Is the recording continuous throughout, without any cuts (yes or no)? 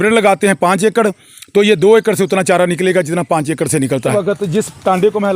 no